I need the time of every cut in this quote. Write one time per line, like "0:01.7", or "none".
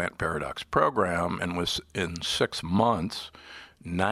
none